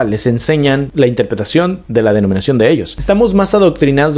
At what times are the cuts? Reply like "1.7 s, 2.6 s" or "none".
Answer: 3.0 s